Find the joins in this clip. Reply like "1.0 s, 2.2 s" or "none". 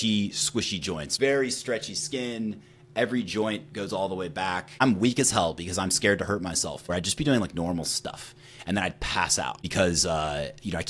1.0 s, 4.8 s, 6.8 s, 9.6 s